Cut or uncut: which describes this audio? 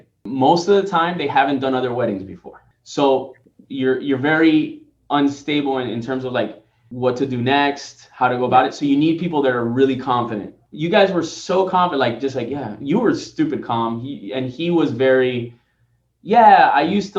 uncut